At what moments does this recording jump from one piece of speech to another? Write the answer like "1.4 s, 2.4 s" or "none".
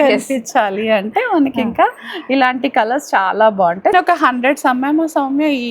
3.9 s